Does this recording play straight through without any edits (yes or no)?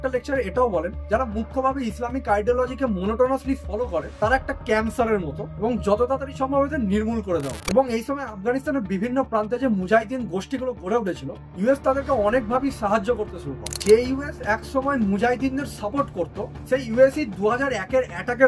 no